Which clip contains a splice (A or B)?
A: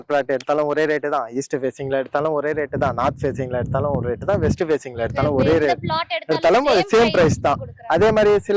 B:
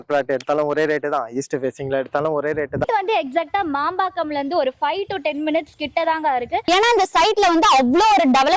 B